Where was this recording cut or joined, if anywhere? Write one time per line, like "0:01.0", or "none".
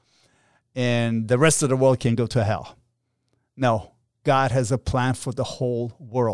none

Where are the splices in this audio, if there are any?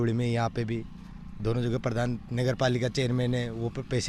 none

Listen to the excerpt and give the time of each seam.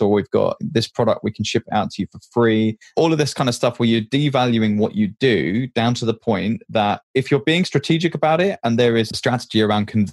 0:02.8

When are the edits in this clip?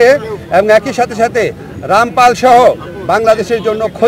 none

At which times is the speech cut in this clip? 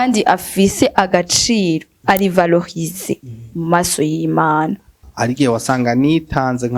0:05.0

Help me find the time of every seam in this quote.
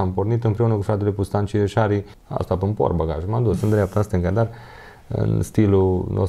0:02.2

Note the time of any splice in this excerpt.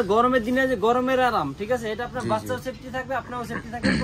none

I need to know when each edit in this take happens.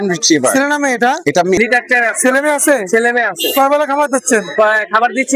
0:01.6

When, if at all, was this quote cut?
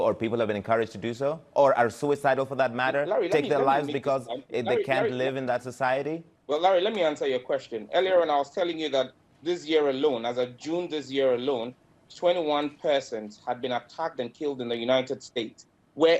0:06.3

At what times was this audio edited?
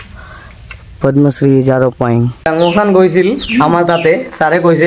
0:02.4

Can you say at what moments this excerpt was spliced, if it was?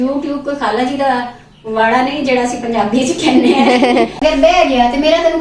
0:04.1

